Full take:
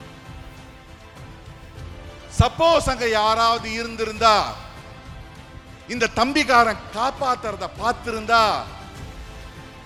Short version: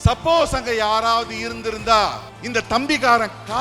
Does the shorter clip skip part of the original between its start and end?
yes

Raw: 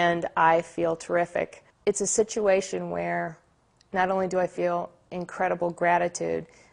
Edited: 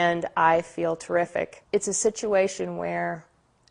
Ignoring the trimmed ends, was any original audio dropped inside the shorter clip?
yes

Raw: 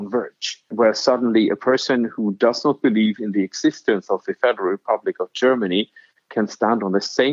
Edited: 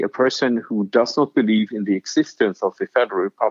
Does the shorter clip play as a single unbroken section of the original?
yes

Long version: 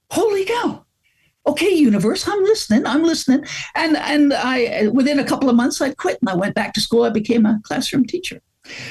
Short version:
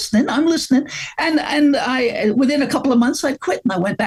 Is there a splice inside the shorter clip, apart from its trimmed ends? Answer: no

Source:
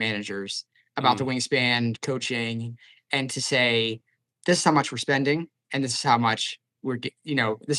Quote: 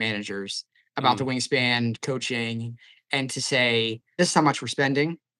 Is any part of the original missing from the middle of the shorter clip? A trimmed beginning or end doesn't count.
yes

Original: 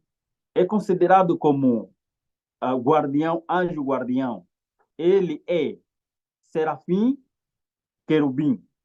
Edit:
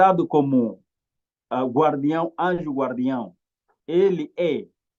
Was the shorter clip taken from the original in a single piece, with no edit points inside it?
yes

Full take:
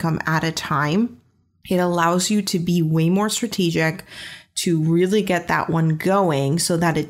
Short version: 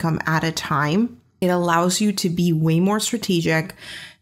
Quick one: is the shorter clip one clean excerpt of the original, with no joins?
no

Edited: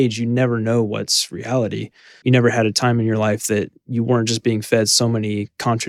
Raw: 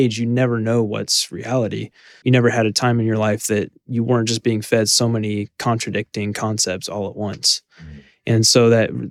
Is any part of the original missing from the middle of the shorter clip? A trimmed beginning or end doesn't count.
no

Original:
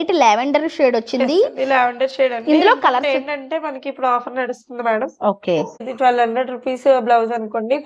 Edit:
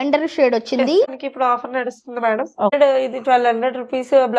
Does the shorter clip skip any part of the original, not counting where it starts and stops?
yes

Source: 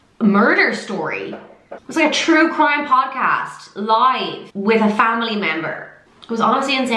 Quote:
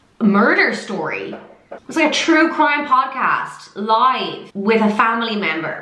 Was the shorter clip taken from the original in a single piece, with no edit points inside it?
yes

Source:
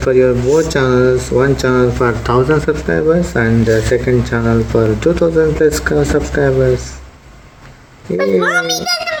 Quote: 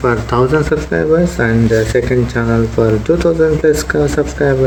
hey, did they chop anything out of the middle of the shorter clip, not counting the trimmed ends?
no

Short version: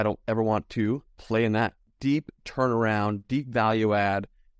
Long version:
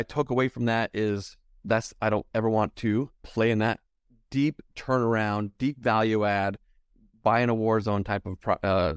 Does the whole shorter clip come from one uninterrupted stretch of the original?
no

